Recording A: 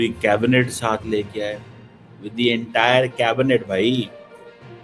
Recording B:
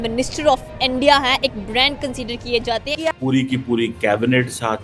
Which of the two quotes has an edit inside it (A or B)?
B